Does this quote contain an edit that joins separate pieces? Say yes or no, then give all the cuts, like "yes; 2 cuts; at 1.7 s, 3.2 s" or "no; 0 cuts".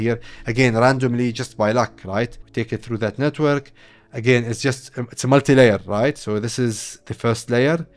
yes; 1 cut; at 2.4 s